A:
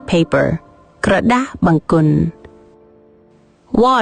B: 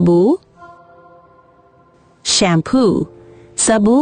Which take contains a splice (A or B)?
A